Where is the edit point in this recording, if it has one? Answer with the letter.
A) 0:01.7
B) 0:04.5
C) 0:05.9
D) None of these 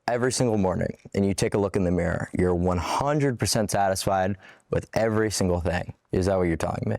C